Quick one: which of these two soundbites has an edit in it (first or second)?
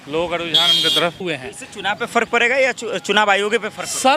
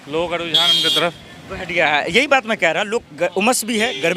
first